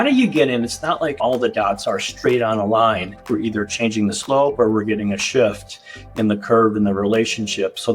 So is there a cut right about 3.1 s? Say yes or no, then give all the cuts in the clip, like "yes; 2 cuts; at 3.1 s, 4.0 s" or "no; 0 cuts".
yes; 2 cuts; at 1.2 s, 3.1 s